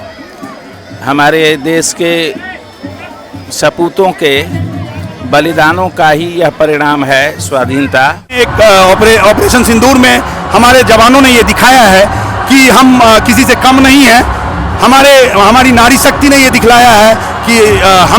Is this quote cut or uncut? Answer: cut